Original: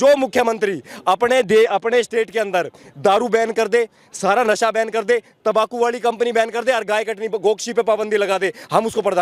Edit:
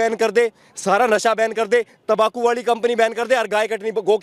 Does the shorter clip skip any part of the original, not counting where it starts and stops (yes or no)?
no